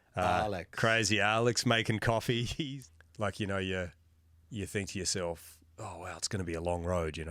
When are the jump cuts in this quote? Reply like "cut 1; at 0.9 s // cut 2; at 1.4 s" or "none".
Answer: cut 1; at 2.5 s